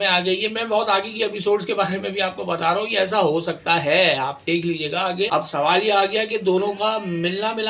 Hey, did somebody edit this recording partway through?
yes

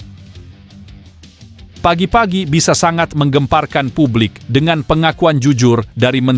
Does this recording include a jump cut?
yes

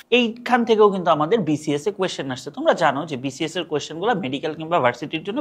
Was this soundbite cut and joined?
no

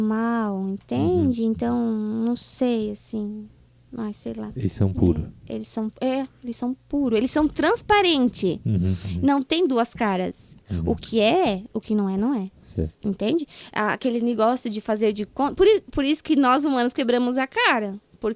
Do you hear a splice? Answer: no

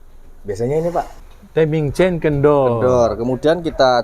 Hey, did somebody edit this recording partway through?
yes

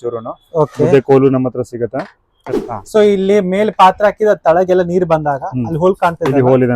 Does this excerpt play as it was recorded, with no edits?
no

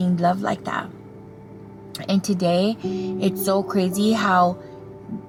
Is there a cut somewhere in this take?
no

